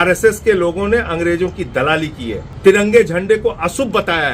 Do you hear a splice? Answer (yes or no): yes